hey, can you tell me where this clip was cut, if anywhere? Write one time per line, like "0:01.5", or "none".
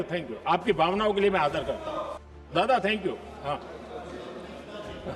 0:02.4

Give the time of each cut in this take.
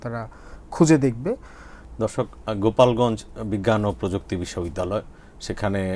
none

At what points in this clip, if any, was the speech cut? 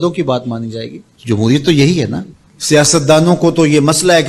0:02.3

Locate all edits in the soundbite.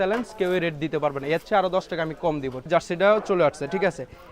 0:02.7

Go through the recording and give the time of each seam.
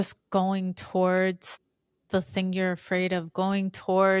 none

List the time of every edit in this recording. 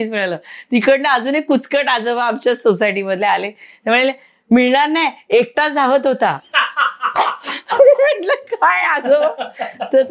none

